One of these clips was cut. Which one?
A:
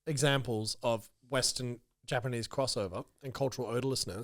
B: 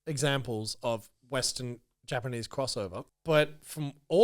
B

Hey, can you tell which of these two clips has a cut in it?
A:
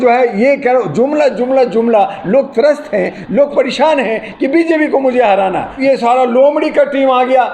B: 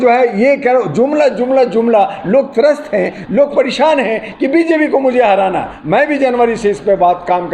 A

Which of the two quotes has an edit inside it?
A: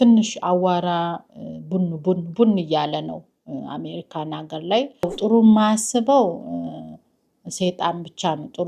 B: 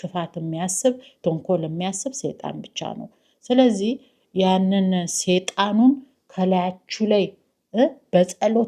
A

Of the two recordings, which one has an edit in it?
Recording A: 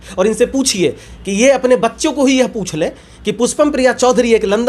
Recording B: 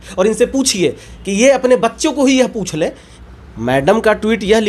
B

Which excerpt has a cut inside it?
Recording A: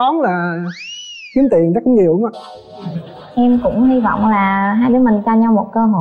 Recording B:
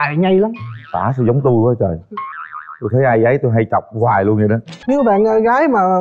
B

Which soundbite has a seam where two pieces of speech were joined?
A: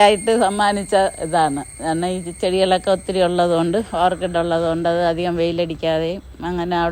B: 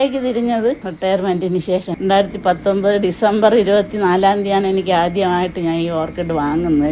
B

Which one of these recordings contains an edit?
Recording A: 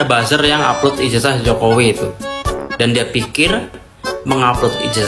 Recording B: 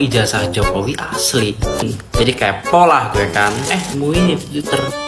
B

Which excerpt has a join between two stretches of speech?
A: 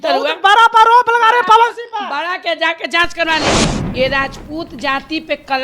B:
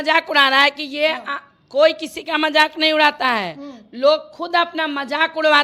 A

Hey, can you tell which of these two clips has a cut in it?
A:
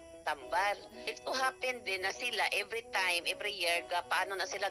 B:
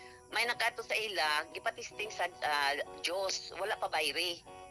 A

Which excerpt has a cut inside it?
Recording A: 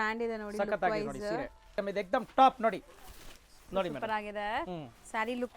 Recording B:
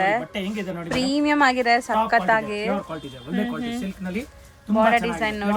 A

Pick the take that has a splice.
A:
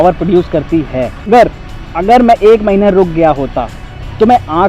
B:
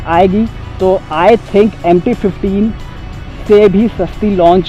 A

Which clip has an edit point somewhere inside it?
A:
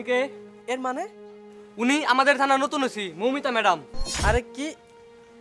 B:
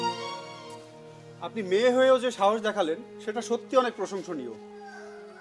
A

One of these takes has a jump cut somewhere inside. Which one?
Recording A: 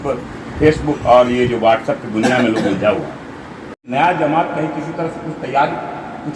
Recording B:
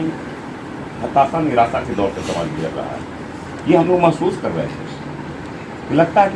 A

